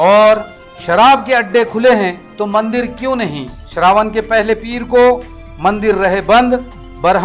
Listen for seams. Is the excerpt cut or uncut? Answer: uncut